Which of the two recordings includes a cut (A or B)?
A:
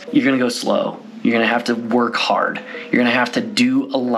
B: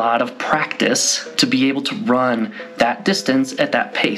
B